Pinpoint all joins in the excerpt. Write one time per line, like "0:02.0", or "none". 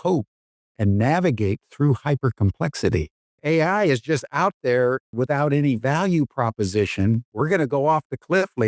0:03.2
0:05.1
0:07.3